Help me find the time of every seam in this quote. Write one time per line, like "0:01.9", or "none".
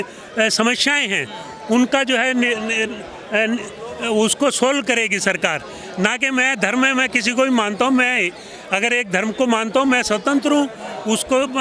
none